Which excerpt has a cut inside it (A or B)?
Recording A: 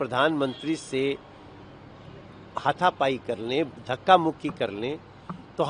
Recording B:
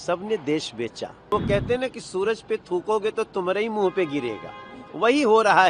B